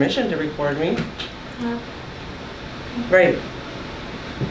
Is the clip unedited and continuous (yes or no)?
yes